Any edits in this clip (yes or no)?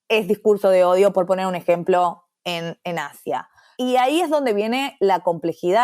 yes